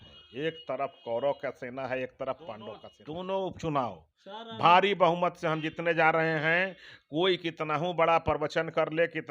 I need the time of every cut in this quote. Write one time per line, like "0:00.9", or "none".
0:02.9